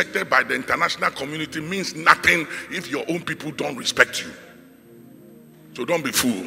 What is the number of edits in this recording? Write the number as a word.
zero